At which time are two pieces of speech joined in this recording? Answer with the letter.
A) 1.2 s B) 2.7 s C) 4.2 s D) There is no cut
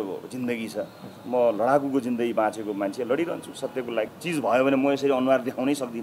C